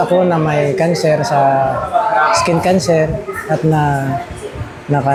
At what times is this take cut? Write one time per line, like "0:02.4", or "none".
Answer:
none